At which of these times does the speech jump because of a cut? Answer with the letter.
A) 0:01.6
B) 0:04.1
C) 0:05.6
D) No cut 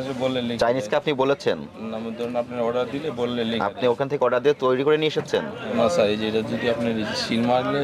C